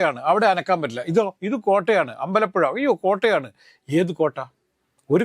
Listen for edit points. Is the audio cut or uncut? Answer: uncut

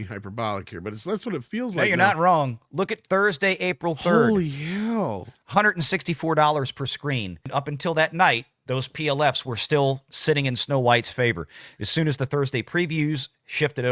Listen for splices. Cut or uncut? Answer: cut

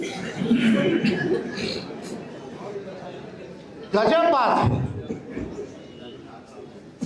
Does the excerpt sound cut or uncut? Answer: uncut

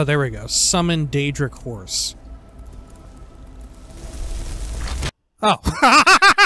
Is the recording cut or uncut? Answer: cut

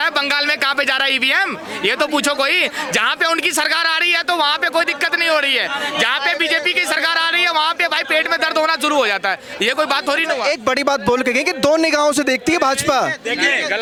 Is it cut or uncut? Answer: uncut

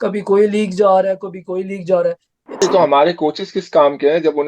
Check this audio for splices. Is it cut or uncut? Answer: cut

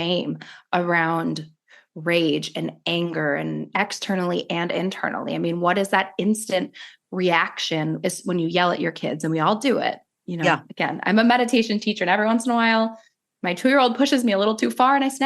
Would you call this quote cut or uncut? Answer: cut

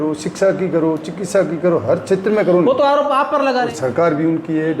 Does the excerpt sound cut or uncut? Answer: cut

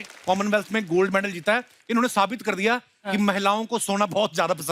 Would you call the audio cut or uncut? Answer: uncut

